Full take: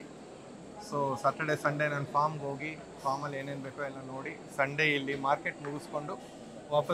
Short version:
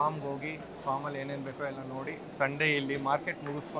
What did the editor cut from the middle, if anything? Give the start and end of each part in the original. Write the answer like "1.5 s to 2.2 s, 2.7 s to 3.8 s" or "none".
none